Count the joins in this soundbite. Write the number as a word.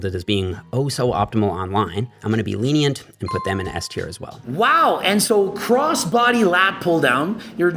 one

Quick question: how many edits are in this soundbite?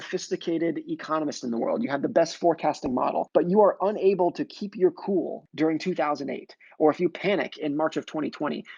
two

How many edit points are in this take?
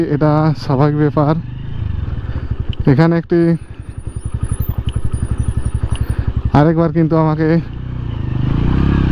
zero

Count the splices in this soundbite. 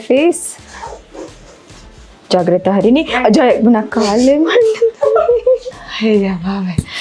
one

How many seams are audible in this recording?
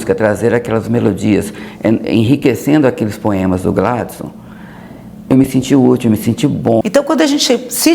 one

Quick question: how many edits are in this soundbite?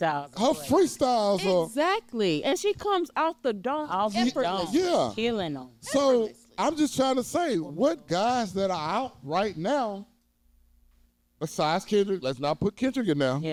zero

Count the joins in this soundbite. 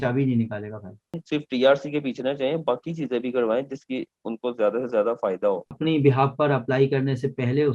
two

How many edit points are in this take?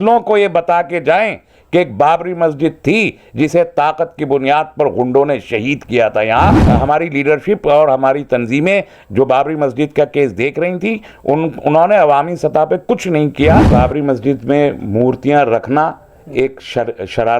two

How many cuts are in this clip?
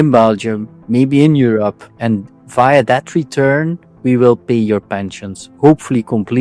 one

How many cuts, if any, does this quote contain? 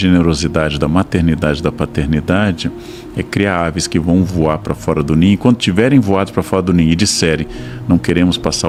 zero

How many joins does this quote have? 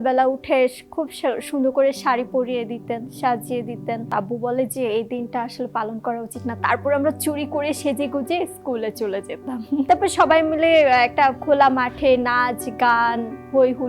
two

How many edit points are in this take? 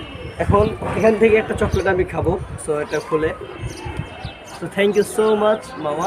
one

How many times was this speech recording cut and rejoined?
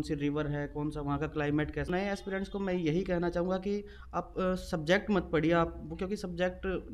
one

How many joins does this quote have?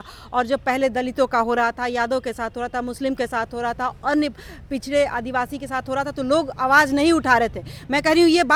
zero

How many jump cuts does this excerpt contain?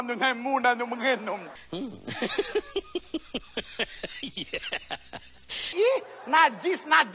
zero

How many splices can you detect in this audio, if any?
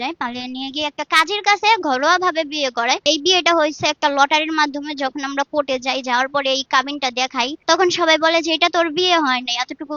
two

